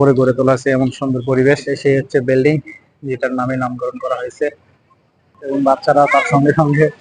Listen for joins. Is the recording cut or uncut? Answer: cut